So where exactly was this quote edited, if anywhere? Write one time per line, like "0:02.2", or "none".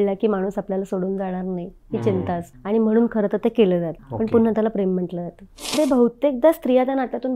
0:02.5
0:04.0
0:05.8